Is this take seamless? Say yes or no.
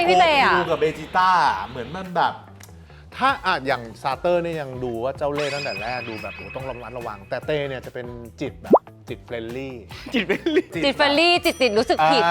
yes